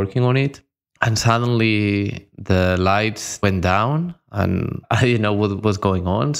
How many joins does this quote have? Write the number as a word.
two